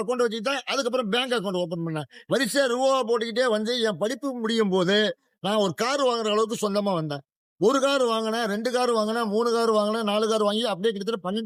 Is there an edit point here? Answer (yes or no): no